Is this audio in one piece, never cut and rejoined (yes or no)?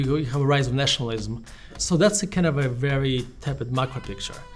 no